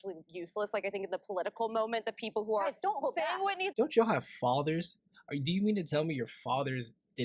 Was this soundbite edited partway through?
yes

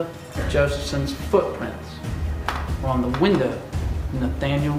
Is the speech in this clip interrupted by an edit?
no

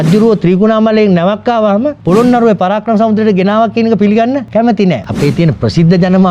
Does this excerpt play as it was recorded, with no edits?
no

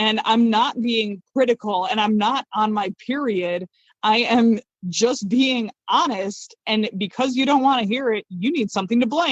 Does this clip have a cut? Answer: no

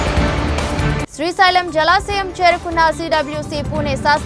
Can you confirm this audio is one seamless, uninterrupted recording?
yes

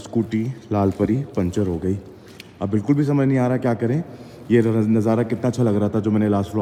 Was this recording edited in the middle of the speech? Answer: no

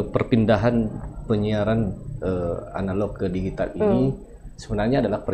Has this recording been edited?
no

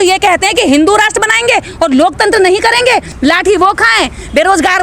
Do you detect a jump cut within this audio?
yes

